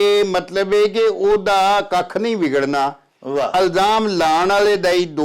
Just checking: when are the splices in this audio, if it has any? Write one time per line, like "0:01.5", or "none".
none